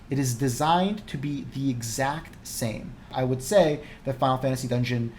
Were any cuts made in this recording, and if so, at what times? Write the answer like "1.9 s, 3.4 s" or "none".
3.0 s